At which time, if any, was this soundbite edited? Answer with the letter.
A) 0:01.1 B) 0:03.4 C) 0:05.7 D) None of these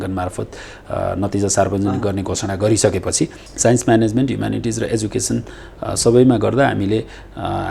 B